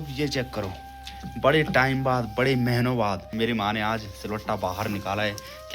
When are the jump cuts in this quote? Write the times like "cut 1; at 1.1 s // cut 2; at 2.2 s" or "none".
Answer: cut 1; at 3.3 s